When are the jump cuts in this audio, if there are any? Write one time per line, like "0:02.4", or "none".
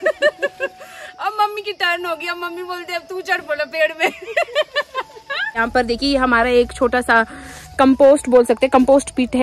0:05.6